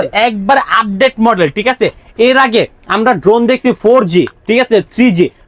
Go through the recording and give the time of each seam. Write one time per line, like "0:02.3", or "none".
none